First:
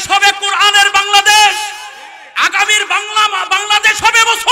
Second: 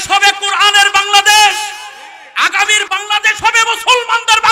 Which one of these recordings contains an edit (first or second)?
second